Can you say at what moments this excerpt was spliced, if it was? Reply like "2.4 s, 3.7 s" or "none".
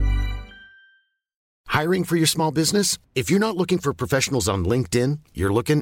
1.4 s